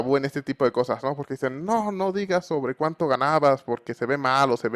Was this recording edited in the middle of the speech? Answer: no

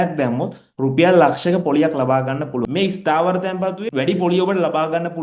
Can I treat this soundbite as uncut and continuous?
no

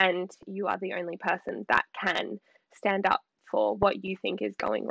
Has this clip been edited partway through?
no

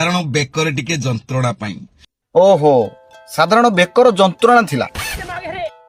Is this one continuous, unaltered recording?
yes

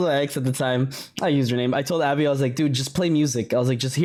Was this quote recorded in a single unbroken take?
yes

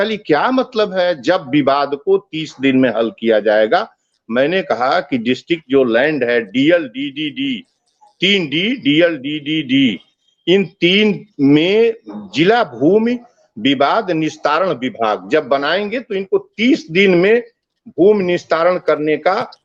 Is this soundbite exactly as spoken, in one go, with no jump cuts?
yes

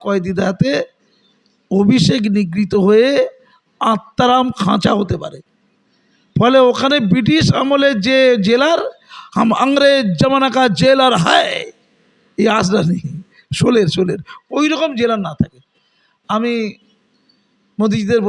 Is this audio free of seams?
yes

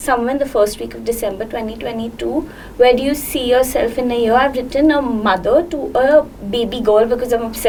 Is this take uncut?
yes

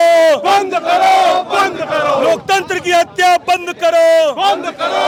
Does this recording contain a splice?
no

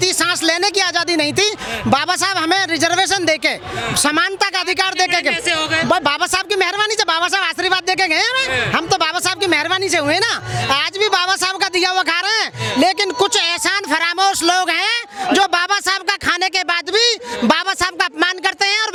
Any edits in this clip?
no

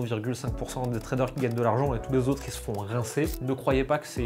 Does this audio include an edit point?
no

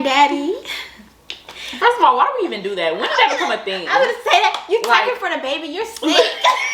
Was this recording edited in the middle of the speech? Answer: no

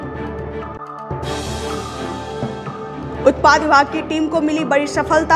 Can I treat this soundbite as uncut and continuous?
no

